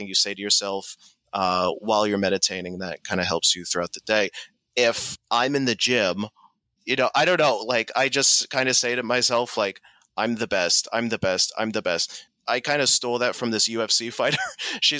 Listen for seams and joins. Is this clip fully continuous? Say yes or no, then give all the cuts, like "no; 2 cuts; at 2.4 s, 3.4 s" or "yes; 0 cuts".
no; 3 cuts; at 5.1 s, 6.8 s, 12.3 s